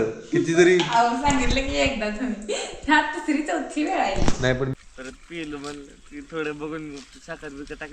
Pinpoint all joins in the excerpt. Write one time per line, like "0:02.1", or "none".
0:04.8